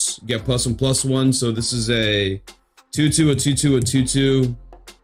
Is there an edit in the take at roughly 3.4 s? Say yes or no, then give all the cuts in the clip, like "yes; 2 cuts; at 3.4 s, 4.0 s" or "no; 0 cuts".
no; 0 cuts